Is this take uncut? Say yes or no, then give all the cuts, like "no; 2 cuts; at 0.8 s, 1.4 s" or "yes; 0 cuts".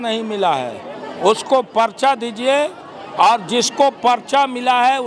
yes; 0 cuts